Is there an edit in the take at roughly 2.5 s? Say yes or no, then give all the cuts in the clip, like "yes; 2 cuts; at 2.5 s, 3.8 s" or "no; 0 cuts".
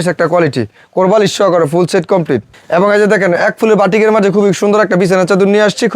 yes; 1 cut; at 2.5 s